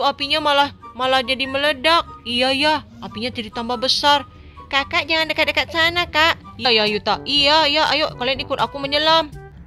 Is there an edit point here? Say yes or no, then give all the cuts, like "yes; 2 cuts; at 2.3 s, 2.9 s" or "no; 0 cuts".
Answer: yes; 1 cut; at 6.7 s